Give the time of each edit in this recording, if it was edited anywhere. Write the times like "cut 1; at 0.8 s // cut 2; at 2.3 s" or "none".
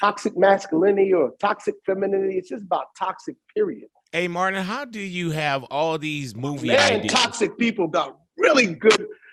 none